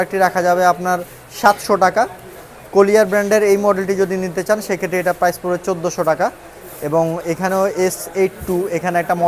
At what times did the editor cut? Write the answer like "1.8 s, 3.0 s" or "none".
none